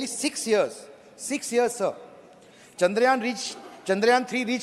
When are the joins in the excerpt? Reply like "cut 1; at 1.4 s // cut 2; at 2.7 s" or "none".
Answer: none